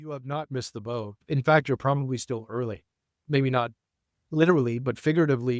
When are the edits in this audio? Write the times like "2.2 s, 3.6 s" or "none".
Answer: 1.2 s, 3.2 s